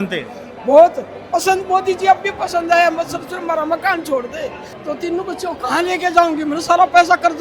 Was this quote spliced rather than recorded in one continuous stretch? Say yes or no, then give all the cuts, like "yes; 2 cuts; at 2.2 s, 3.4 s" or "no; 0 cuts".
yes; 1 cut; at 4.7 s